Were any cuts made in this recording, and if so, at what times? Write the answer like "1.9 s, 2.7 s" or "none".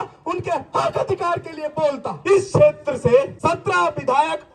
2.1 s, 3.3 s

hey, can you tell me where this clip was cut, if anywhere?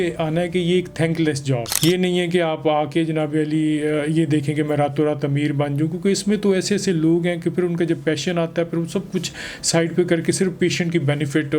none

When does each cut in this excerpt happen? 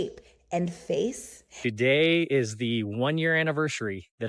1.6 s

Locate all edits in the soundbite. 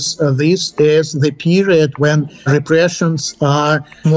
none

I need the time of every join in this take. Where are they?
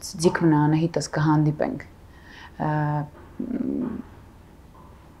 none

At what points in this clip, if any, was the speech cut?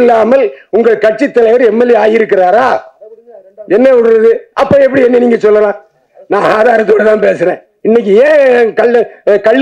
7.7 s

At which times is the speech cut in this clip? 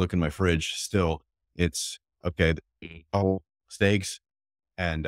none

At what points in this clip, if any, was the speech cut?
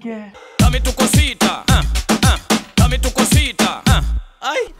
none

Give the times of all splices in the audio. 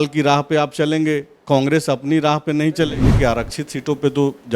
3.0 s

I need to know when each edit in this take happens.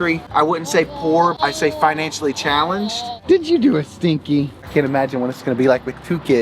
1.4 s, 3.1 s, 4.6 s

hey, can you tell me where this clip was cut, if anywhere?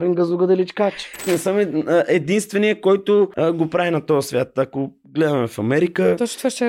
1.2 s, 3.3 s

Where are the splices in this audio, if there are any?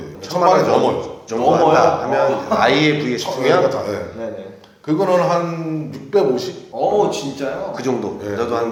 none

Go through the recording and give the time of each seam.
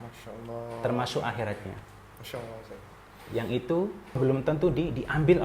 4.2 s

